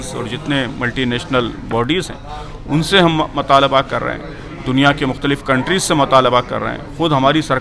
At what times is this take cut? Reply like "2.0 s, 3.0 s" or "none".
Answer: none